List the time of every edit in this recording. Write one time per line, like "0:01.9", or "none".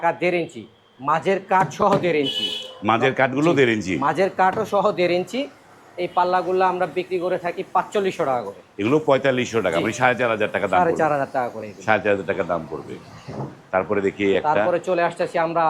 none